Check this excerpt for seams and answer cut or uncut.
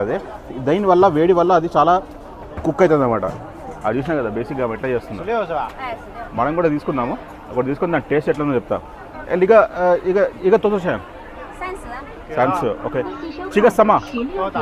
uncut